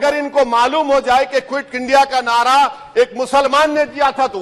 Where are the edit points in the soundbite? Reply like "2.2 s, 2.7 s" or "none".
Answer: none